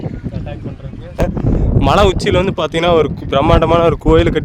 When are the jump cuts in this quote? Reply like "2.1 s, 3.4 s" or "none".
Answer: 1.2 s